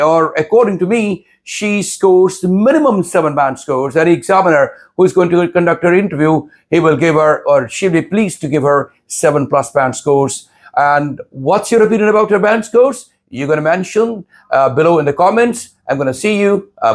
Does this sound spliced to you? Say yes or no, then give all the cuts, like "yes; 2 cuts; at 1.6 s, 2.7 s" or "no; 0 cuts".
no; 0 cuts